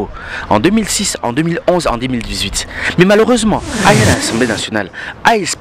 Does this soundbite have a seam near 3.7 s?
yes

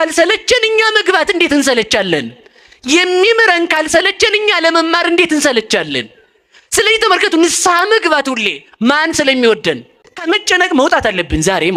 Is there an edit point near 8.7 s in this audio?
no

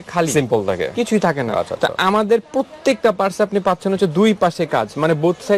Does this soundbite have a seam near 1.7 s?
no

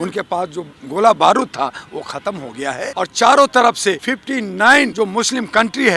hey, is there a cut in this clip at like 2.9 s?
yes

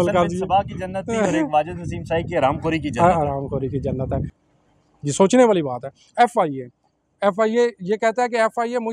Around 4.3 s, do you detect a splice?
yes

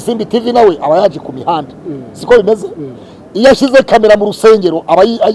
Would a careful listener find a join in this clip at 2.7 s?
no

